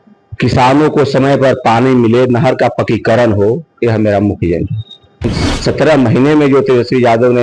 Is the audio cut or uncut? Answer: cut